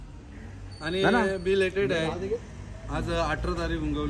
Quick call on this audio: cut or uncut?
uncut